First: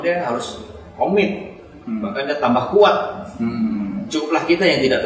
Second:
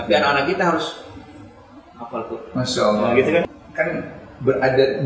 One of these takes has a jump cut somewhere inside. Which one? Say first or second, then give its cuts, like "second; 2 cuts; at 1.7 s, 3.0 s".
second; 1 cut; at 3.4 s